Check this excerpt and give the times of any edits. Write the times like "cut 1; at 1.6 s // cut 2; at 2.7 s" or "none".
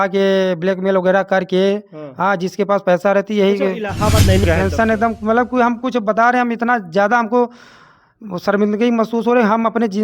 cut 1; at 4.4 s